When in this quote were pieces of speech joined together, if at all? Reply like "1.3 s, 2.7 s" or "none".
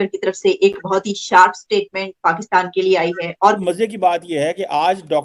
3.6 s